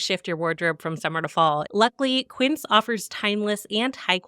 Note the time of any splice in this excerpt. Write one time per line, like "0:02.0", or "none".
0:01.7